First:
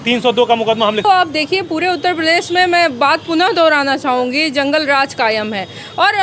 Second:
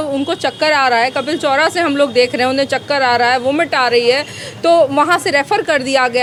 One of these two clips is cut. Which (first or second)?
first